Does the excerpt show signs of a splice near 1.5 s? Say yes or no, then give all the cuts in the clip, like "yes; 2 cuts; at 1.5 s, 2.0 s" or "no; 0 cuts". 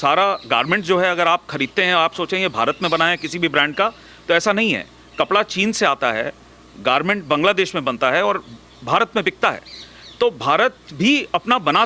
no; 0 cuts